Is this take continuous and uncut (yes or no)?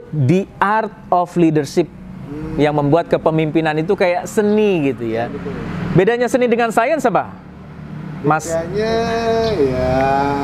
yes